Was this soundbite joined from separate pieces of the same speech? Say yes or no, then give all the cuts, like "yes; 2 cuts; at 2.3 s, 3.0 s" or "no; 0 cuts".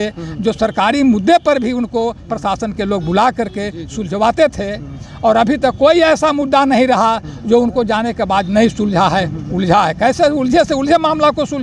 no; 0 cuts